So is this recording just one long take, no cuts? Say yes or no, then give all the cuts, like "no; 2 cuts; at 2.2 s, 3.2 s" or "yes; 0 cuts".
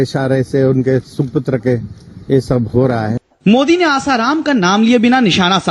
no; 1 cut; at 3.2 s